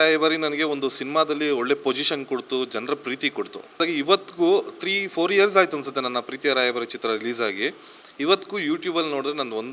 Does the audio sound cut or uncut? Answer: cut